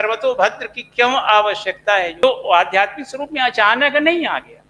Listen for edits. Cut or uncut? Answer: cut